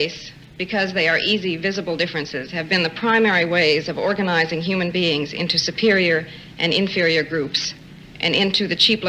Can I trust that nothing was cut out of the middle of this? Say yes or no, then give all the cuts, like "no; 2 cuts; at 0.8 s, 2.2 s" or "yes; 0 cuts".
yes; 0 cuts